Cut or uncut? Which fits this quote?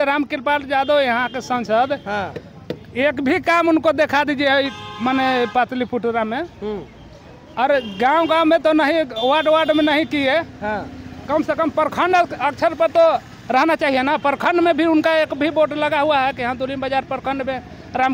uncut